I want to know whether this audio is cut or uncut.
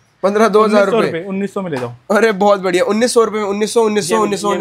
uncut